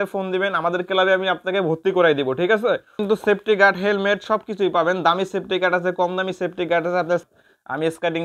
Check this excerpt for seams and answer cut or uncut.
cut